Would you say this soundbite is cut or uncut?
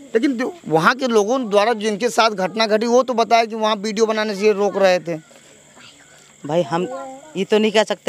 uncut